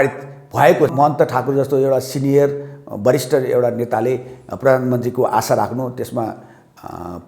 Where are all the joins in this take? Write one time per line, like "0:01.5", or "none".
0:00.9